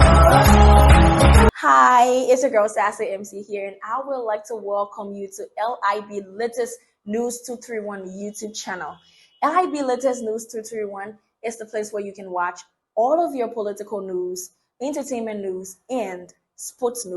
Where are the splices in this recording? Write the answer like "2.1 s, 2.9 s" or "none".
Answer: 1.5 s